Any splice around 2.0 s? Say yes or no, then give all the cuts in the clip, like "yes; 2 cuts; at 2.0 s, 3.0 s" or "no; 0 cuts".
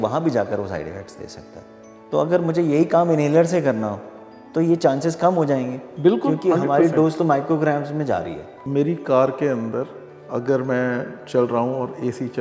yes; 2 cuts; at 2.0 s, 8.7 s